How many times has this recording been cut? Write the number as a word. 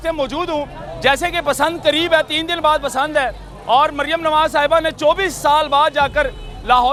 zero